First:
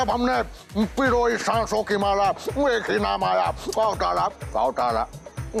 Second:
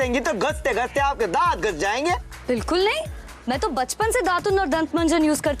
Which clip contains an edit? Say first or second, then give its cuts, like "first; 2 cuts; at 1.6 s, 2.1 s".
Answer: second; 1 cut; at 2.2 s